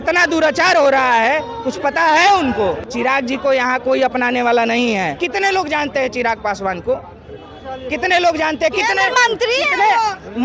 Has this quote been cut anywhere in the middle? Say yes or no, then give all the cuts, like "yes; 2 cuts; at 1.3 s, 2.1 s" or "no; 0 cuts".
yes; 2 cuts; at 2.8 s, 5.2 s